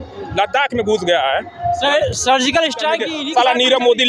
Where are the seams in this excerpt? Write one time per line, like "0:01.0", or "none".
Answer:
0:03.1